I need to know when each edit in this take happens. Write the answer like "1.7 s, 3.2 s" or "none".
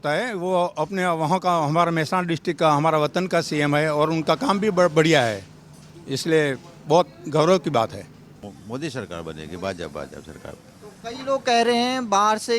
8.5 s